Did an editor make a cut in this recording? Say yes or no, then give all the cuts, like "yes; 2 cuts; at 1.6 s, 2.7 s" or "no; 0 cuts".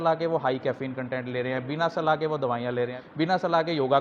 yes; 1 cut; at 3.0 s